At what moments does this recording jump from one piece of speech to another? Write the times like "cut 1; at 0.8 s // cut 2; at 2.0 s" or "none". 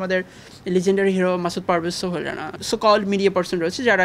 cut 1; at 2.6 s